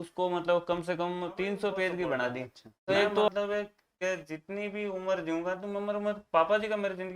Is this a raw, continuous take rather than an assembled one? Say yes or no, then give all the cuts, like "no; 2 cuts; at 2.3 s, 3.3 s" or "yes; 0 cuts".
no; 1 cut; at 3.3 s